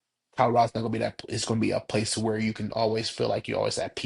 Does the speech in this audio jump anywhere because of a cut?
no; 0 cuts

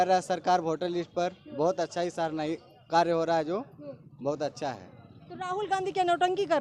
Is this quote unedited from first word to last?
yes; 0 cuts

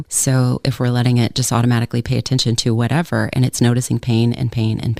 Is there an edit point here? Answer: no; 0 cuts

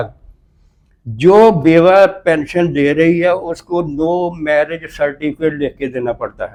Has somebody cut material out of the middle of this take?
no; 0 cuts

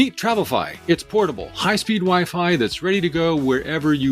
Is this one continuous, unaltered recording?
yes; 0 cuts

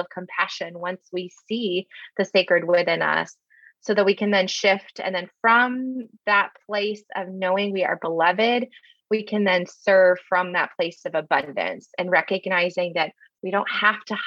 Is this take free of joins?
yes; 0 cuts

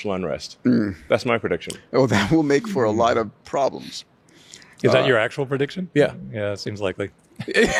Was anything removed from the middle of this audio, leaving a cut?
no; 0 cuts

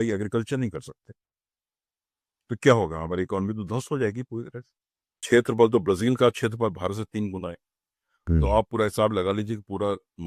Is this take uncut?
no; 1 cut; at 5.2 s

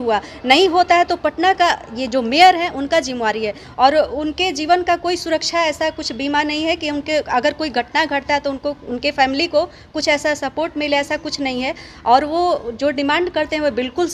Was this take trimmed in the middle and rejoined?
yes; 1 cut; at 3.6 s

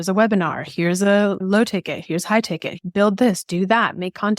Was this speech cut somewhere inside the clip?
yes; 2 cuts; at 1.4 s, 2.8 s

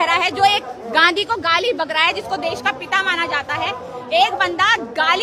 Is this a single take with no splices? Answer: yes; 0 cuts

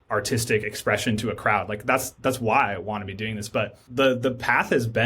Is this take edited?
yes; 1 cut; at 3.9 s

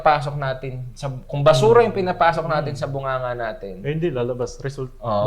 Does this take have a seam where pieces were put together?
no; 0 cuts

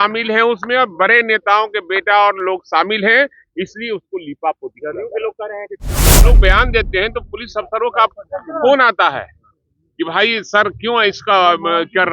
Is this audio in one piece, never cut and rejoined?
no; 1 cut; at 6.2 s

